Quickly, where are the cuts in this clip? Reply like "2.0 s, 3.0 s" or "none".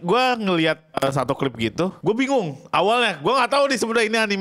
0.9 s, 2.0 s

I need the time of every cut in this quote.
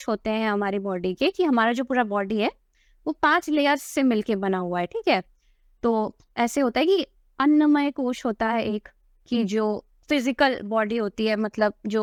none

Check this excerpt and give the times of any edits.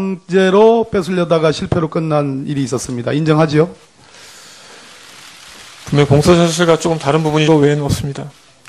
none

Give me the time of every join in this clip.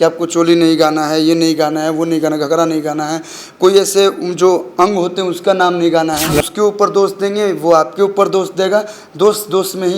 6.4 s

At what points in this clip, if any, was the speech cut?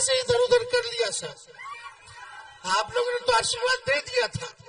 none

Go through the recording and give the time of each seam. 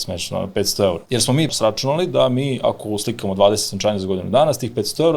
1.5 s

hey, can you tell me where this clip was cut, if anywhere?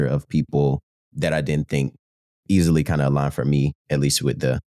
1.0 s

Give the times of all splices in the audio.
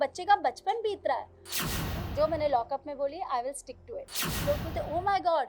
1.5 s, 4.3 s

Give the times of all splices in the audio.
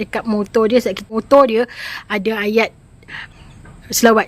1.0 s, 3.2 s

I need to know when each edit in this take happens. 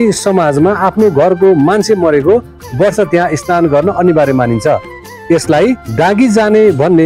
none

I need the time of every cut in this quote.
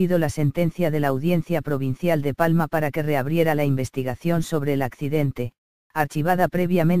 none

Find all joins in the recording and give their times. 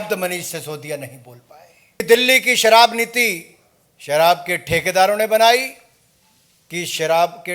2.0 s

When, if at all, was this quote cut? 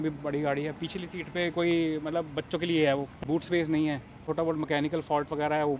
3.2 s, 4.2 s

